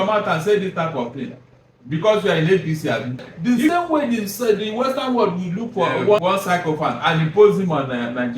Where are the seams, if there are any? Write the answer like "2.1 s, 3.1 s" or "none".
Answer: 3.3 s, 6.2 s